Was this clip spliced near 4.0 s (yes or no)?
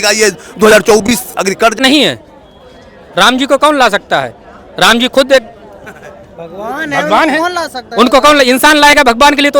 no